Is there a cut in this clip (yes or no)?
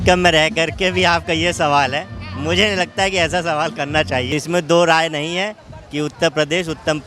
yes